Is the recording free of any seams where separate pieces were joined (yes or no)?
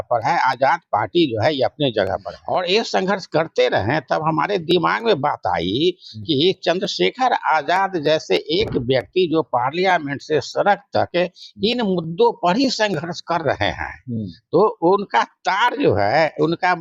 no